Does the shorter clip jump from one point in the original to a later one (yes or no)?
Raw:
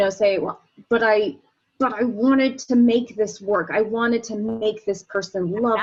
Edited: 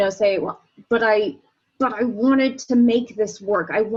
no